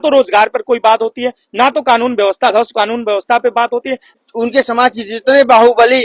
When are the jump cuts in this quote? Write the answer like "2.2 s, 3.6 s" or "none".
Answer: 4.0 s